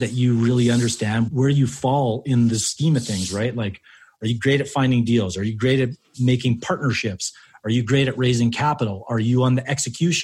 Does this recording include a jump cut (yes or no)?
yes